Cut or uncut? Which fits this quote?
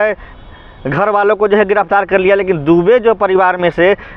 uncut